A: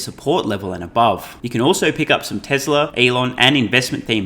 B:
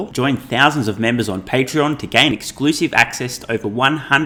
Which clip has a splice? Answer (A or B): A